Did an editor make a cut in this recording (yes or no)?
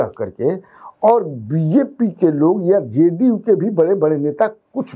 no